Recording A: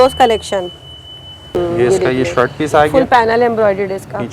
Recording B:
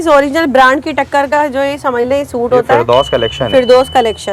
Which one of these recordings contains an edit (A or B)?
A